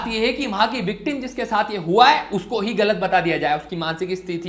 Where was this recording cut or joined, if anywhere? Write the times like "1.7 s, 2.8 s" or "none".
none